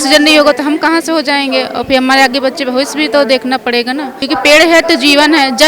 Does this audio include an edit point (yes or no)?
yes